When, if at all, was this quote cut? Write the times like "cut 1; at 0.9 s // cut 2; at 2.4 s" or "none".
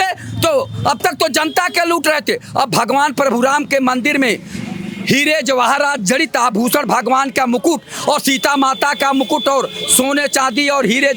none